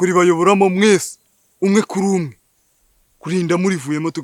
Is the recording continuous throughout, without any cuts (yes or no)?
yes